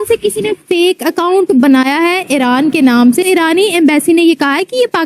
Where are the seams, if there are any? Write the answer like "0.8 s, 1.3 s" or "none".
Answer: 3.2 s